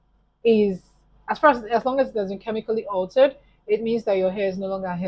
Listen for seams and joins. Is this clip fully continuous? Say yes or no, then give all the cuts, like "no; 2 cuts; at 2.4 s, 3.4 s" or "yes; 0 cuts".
yes; 0 cuts